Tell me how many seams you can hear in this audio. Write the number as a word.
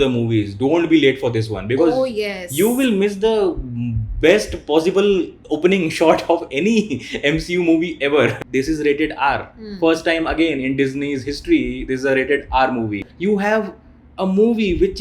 two